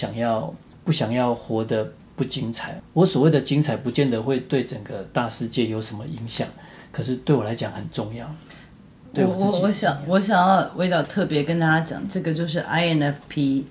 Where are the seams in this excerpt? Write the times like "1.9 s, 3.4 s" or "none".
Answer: none